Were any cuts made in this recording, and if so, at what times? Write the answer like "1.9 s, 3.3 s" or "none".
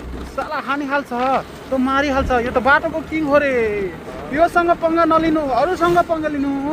none